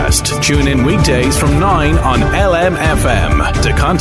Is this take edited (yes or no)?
no